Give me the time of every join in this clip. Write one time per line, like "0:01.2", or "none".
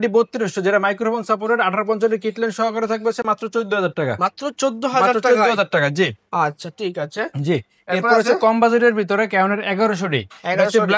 none